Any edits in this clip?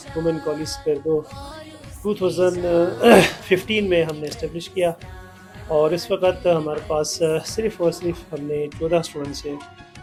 no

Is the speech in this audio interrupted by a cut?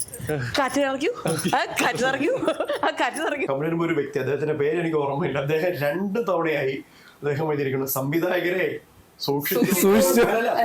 yes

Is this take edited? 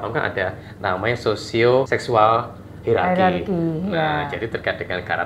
yes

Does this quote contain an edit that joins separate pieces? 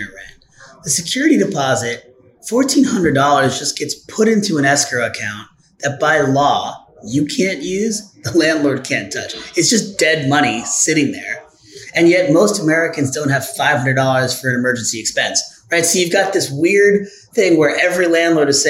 no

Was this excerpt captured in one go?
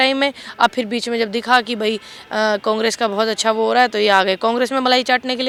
yes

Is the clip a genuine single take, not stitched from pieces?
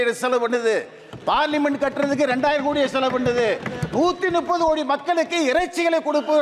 yes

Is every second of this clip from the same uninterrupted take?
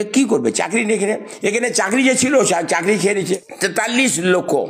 no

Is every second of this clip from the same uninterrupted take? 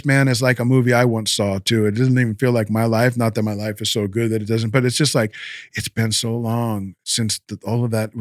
yes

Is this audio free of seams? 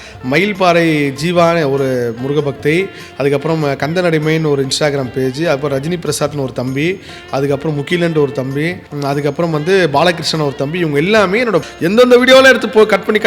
no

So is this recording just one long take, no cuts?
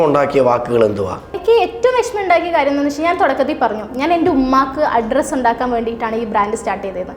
no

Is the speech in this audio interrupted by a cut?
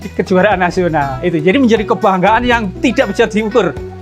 no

